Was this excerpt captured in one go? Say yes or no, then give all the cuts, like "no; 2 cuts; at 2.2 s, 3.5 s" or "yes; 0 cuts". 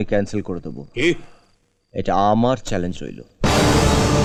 yes; 0 cuts